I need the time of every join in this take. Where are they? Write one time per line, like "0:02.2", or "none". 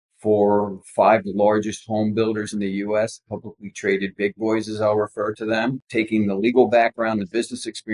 0:05.8